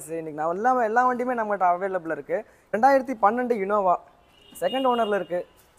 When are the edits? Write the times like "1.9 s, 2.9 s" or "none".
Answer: 2.7 s